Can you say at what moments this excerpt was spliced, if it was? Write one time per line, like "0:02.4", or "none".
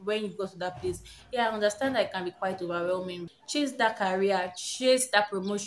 0:03.2